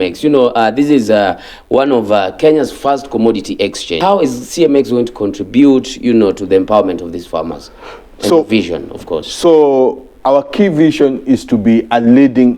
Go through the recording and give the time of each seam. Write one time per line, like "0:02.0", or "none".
0:03.9